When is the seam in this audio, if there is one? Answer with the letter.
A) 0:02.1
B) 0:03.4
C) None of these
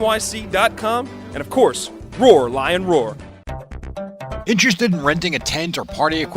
B